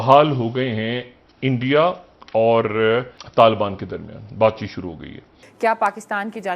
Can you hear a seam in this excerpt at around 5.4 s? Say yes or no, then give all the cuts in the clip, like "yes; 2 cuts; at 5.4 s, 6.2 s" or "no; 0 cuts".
yes; 2 cuts; at 3.2 s, 5.4 s